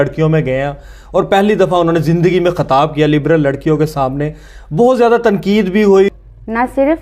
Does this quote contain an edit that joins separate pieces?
yes; 1 cut; at 6.1 s

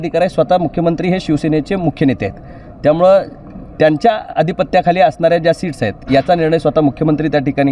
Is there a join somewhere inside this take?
no; 0 cuts

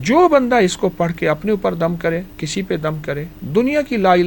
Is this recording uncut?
no; 2 cuts; at 2.4 s, 3.4 s

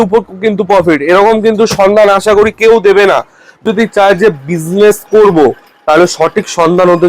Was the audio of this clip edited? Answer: yes; 1 cut; at 3.6 s

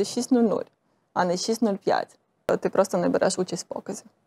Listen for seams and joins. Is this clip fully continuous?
no; 1 cut; at 2.5 s

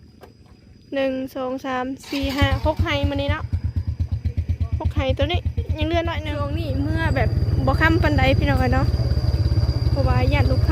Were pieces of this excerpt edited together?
yes; 1 cut; at 6.5 s

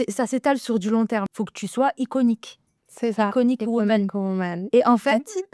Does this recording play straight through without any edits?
no; 1 cut; at 1.3 s

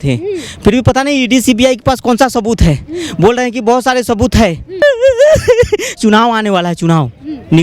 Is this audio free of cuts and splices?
no; 1 cut; at 4.8 s

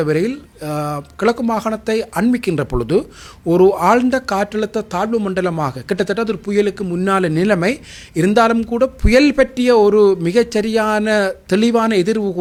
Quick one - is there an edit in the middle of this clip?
no; 0 cuts

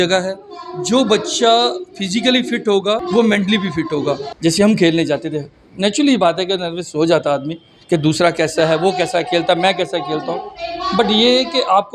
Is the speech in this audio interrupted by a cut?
yes; 1 cut; at 4.3 s

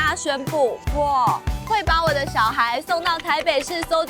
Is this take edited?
no; 0 cuts

